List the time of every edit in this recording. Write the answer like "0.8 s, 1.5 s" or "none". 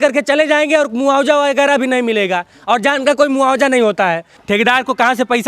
4.3 s